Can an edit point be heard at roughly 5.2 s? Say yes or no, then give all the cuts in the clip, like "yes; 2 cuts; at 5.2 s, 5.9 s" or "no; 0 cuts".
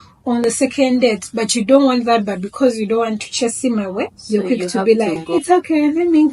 yes; 2 cuts; at 4.2 s, 5.2 s